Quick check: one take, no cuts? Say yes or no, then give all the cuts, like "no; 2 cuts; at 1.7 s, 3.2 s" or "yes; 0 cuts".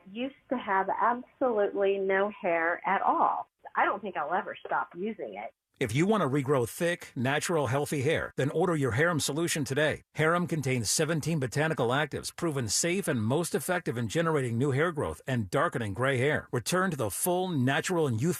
yes; 0 cuts